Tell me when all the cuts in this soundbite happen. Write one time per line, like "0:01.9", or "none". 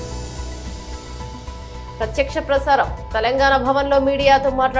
none